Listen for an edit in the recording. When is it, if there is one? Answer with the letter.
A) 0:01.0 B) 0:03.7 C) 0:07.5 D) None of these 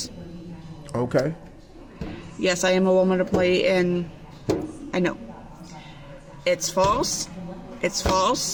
D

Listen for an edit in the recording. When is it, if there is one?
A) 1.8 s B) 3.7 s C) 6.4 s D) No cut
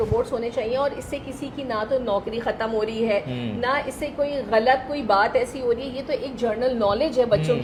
D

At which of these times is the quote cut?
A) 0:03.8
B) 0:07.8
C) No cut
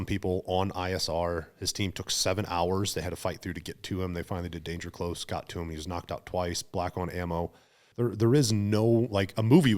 B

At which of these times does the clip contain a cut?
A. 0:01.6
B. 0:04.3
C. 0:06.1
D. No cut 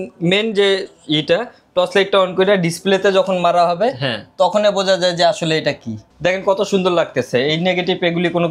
C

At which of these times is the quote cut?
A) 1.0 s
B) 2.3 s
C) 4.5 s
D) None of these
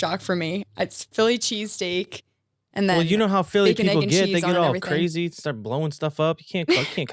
D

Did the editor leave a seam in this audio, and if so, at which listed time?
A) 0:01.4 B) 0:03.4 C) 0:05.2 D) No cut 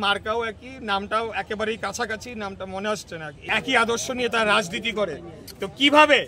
B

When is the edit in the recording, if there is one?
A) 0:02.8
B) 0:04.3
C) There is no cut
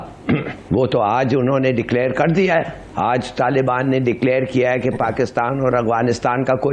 A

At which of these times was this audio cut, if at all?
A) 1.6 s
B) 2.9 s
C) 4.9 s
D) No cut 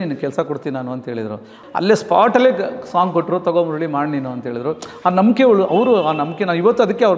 A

